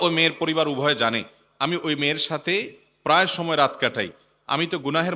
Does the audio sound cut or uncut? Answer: uncut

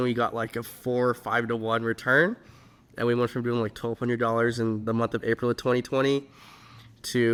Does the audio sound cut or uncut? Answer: uncut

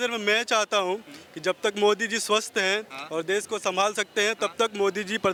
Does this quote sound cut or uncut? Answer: uncut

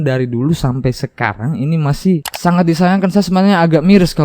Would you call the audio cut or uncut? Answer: cut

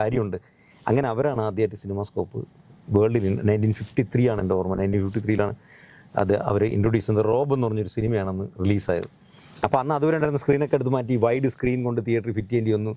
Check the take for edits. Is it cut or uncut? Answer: uncut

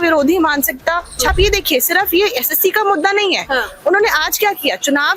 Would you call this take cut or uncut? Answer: cut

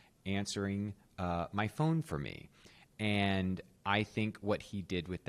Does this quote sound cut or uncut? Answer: uncut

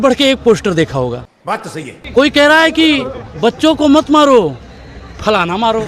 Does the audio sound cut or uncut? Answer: uncut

